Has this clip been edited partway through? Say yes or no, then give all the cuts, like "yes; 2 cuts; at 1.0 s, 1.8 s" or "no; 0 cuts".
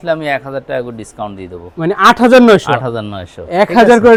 no; 0 cuts